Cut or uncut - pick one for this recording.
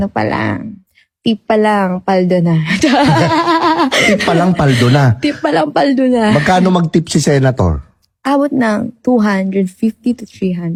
uncut